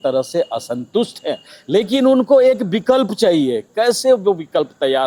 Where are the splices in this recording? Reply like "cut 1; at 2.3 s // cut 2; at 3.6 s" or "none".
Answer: none